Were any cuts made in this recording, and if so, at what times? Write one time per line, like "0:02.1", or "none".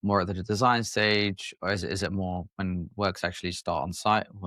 none